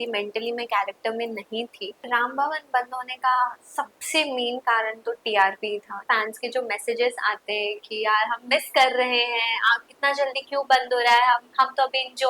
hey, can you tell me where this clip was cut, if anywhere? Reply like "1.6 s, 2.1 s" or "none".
1.9 s, 6.0 s

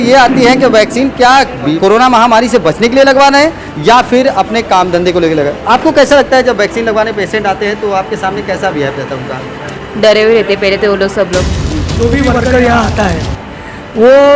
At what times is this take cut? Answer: 1.8 s, 9.7 s, 11.9 s

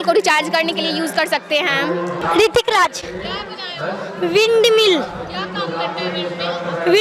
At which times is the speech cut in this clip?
none

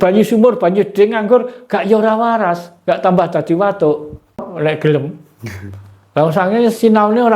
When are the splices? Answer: 4.5 s

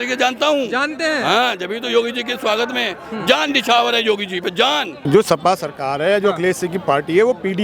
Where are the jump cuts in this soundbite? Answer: 4.9 s

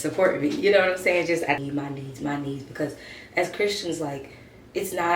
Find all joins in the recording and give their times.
1.6 s

